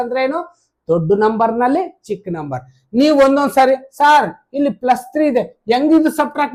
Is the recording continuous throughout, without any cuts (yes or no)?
yes